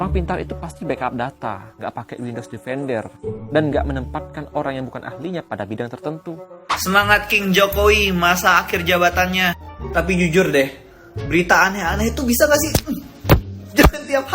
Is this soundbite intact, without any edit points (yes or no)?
no